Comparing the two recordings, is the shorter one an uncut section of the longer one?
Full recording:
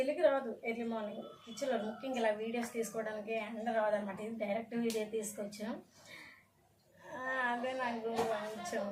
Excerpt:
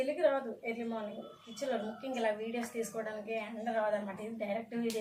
yes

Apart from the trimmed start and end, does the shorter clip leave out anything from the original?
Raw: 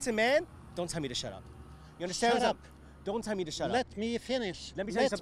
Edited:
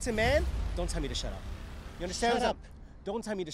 no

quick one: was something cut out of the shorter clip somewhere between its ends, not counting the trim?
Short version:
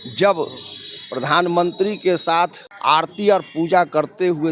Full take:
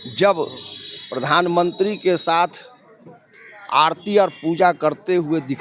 yes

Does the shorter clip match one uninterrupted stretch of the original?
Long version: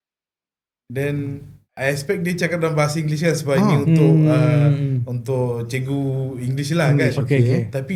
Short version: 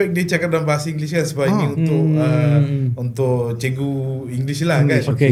yes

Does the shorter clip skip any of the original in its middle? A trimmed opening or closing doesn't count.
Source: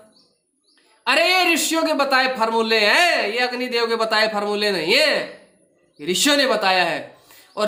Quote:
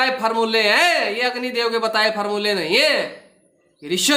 no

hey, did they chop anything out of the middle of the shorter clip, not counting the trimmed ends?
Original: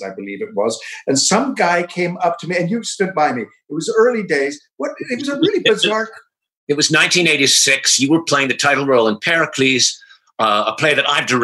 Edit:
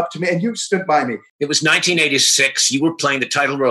yes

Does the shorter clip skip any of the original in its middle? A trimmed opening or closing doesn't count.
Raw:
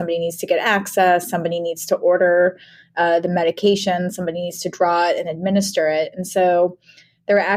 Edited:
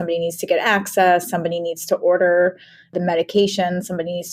yes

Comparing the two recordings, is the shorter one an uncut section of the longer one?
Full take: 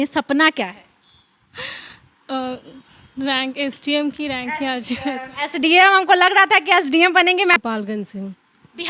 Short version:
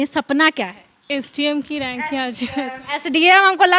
no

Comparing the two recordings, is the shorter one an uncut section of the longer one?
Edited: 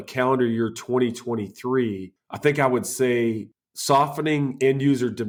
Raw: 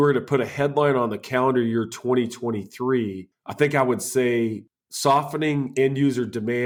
yes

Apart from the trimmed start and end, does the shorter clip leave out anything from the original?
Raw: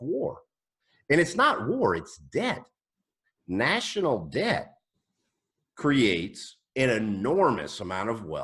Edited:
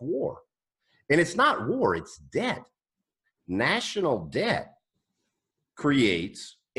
no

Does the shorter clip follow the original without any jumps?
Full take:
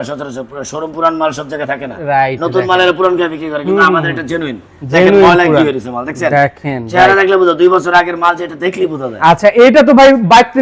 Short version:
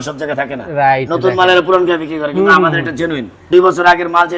no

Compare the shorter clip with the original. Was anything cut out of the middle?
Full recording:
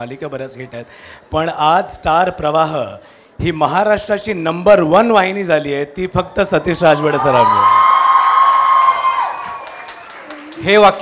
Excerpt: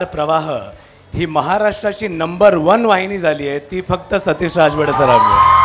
no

